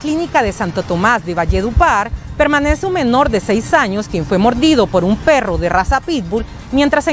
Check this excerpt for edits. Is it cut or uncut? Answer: uncut